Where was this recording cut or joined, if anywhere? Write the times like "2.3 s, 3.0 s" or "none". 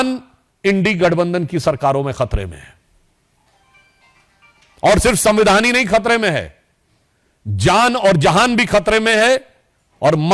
none